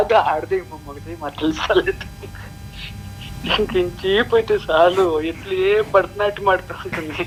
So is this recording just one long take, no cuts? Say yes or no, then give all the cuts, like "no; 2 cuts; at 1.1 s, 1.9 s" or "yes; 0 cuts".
yes; 0 cuts